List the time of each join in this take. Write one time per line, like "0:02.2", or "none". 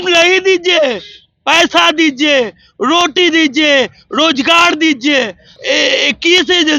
none